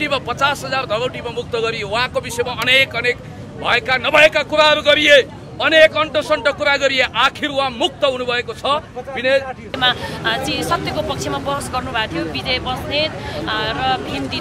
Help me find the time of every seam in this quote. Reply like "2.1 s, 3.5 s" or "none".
9.7 s